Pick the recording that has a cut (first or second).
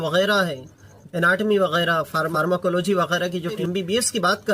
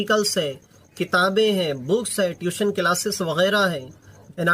first